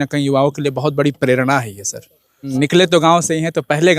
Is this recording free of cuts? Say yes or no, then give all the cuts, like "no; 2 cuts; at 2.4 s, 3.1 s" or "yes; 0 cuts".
no; 1 cut; at 2.5 s